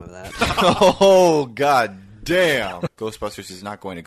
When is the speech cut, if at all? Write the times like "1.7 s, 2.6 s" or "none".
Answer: 2.9 s